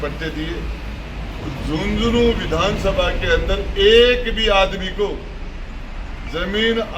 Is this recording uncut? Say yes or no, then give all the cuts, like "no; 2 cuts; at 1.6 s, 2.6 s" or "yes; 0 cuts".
yes; 0 cuts